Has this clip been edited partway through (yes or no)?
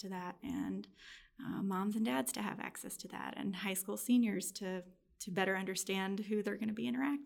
no